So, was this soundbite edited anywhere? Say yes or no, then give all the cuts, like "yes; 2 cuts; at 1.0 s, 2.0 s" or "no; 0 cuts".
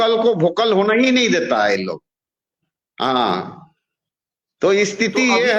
no; 0 cuts